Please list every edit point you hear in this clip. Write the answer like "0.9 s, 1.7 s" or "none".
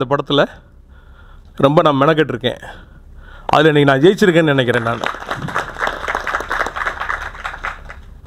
none